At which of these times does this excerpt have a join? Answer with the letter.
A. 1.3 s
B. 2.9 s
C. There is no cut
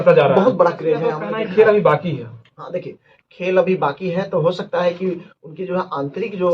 A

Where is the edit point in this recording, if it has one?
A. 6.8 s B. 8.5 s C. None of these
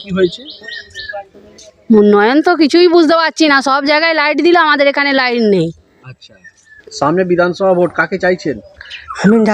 A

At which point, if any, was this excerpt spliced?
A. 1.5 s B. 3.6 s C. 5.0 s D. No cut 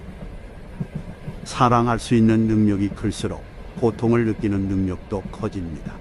D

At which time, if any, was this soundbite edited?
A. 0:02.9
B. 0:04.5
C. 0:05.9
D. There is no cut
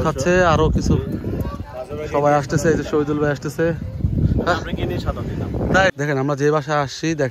C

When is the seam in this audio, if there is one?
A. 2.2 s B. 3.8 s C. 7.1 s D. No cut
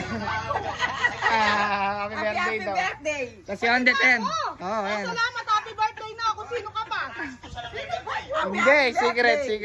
D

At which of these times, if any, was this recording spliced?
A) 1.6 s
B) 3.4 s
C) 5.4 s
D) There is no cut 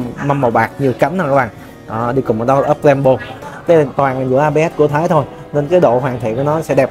B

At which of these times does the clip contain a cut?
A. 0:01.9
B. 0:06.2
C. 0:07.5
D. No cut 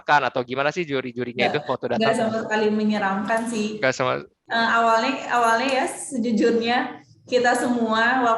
D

